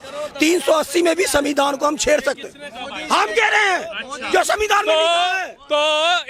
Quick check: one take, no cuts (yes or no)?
yes